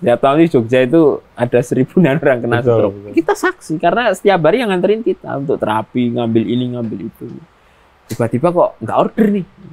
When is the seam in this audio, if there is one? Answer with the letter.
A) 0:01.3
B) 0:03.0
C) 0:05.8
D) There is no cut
B